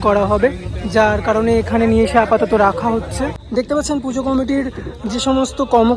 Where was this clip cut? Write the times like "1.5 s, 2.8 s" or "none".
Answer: 3.2 s

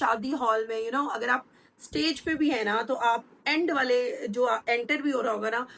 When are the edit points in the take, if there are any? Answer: none

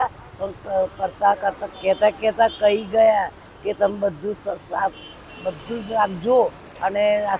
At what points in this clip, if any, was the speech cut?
none

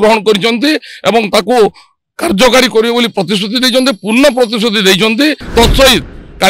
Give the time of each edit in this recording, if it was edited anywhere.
5.4 s

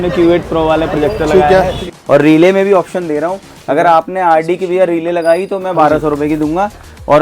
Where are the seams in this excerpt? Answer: 1.8 s

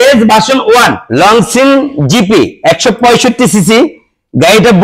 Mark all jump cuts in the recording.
1.0 s

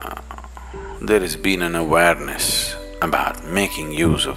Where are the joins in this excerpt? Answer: none

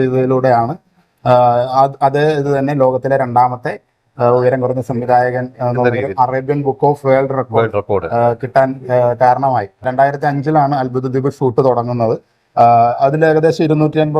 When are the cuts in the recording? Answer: 9.9 s

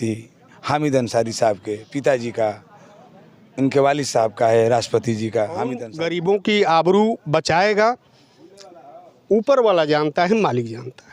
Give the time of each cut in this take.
5.9 s

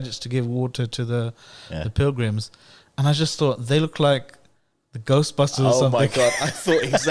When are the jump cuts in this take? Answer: none

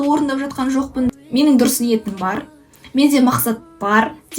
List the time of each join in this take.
1.1 s

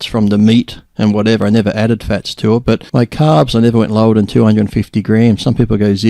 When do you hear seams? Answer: 2.8 s

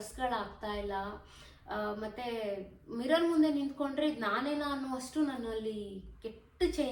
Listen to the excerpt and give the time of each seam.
none

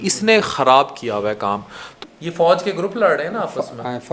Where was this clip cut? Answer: 1.9 s

